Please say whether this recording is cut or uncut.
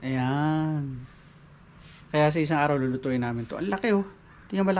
uncut